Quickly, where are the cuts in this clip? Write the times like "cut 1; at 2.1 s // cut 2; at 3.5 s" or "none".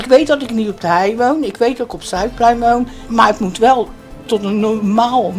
cut 1; at 3.0 s

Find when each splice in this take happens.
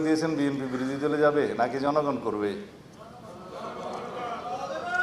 none

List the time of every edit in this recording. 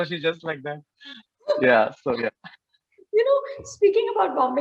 none

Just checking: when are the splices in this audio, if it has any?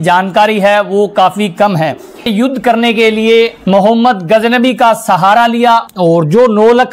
cut 1; at 2.3 s // cut 2; at 5.9 s

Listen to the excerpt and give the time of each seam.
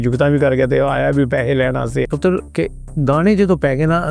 cut 1; at 2.1 s

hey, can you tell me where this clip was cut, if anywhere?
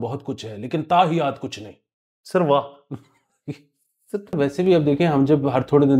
cut 1; at 4.4 s

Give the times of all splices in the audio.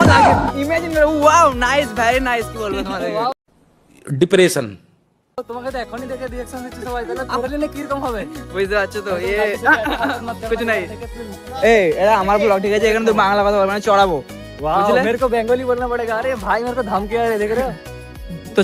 none

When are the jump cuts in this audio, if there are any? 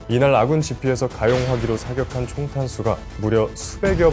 cut 1; at 1.1 s // cut 2; at 3.1 s

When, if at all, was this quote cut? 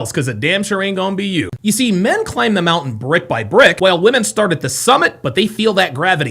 cut 1; at 1.5 s

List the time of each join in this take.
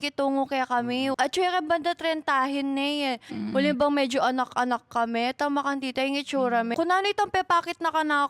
cut 1; at 1.2 s // cut 2; at 6.7 s

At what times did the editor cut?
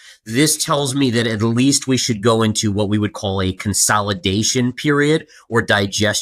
none

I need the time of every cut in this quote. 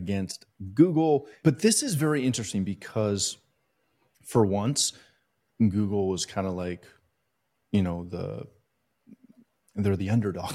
cut 1; at 1.3 s

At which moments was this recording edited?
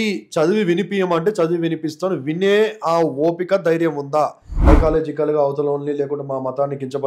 cut 1; at 4.6 s

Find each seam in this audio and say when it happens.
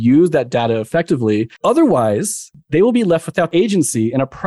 cut 1; at 1.5 s // cut 2; at 2.5 s

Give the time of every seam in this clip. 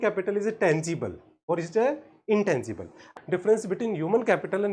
cut 1; at 3.1 s

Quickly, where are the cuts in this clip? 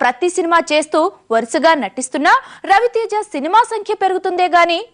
cut 1; at 1.2 s

